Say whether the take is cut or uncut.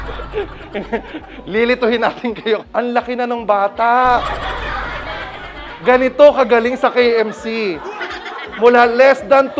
cut